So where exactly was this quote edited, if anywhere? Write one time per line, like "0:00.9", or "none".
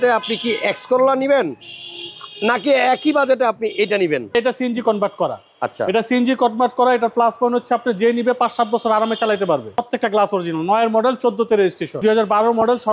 0:04.3
0:09.8
0:11.9